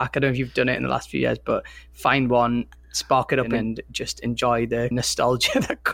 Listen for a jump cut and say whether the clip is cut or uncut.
cut